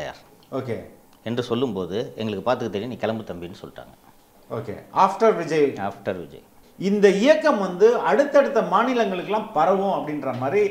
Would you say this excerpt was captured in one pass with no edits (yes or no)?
no